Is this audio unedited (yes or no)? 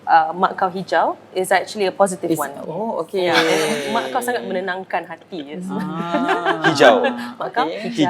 yes